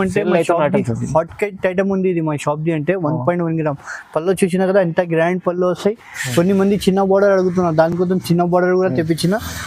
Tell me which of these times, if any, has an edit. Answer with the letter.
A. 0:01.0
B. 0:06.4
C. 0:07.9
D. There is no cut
D